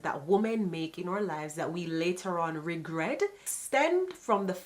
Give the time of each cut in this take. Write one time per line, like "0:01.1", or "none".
0:03.5

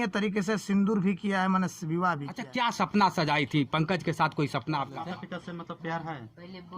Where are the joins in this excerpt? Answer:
0:02.4
0:05.0

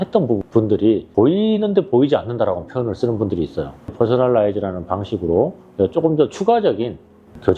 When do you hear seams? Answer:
0:01.1
0:03.9

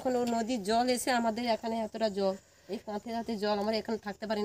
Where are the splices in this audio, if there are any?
none

